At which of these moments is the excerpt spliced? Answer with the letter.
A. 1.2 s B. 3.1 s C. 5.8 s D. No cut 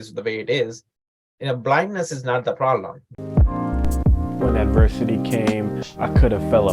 B